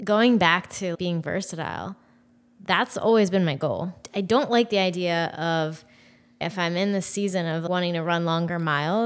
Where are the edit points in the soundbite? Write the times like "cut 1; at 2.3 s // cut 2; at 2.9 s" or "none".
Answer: cut 1; at 0.9 s // cut 2; at 3.9 s // cut 3; at 6.4 s // cut 4; at 7.6 s